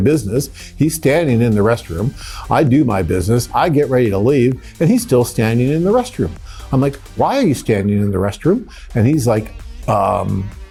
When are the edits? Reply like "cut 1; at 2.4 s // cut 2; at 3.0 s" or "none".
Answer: none